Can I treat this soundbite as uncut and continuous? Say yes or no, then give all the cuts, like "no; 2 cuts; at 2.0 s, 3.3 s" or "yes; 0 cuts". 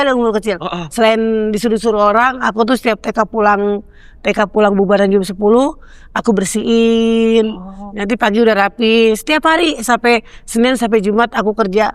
yes; 0 cuts